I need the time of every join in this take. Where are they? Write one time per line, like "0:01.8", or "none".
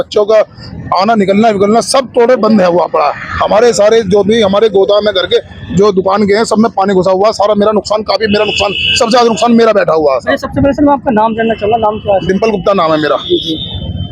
none